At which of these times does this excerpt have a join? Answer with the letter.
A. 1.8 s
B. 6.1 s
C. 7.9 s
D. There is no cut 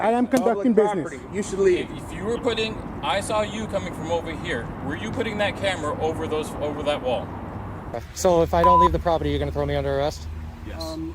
C